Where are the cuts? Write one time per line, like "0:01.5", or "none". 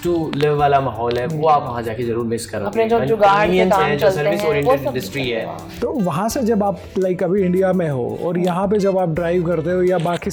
none